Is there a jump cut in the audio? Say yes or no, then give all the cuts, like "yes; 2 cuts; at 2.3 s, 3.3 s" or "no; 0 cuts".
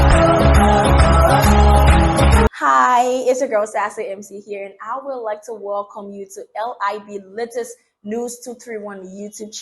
yes; 1 cut; at 2.5 s